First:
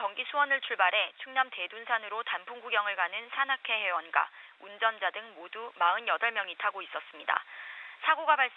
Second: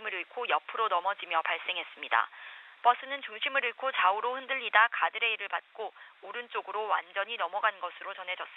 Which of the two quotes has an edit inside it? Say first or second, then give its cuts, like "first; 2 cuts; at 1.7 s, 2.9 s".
second; 1 cut; at 4.1 s